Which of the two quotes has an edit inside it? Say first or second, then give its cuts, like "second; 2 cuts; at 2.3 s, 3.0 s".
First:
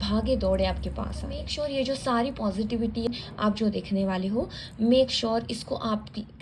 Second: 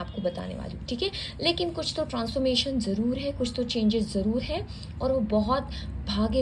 first; 2 cuts; at 1.4 s, 3.1 s